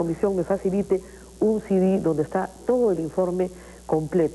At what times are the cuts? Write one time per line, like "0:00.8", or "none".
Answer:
none